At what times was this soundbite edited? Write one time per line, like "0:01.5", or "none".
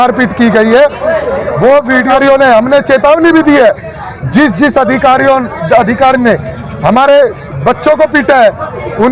0:02.1